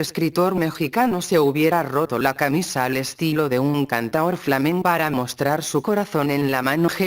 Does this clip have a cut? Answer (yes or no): no